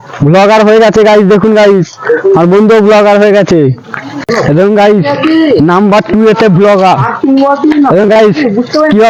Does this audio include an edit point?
no; 0 cuts

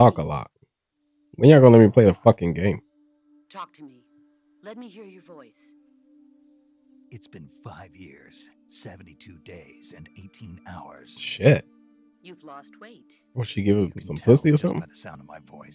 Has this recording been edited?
no; 0 cuts

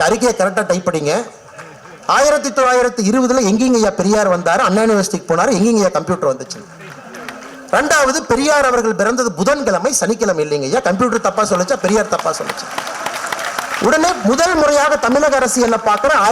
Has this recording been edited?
no; 0 cuts

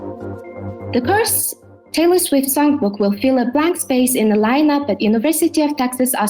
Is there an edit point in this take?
yes; 1 cut; at 0.9 s

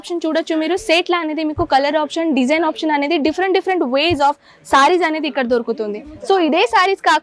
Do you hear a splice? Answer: no; 0 cuts

